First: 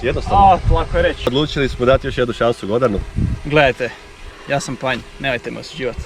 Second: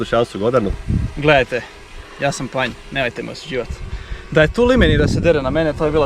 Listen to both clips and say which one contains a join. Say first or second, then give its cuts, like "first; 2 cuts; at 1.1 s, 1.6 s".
first; 1 cut; at 1.2 s